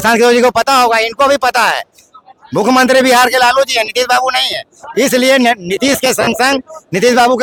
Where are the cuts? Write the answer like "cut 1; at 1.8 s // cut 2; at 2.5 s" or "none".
none